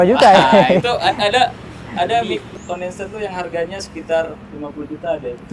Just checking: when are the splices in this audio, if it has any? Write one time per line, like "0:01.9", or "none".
0:02.6